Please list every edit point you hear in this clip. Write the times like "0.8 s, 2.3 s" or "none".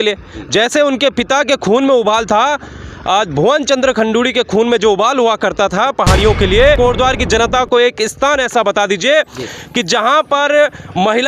6.8 s